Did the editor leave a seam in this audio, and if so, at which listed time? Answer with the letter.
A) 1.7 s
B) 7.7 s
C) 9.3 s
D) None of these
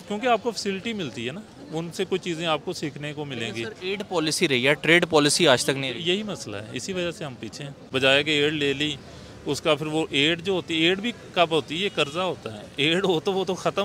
B